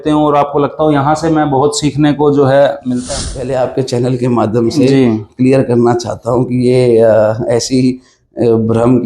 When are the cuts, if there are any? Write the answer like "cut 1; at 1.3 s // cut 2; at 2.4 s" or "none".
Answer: cut 1; at 3.2 s